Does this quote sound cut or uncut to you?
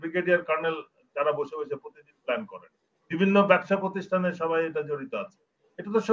uncut